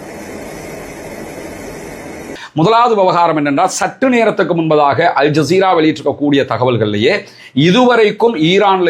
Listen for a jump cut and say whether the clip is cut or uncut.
cut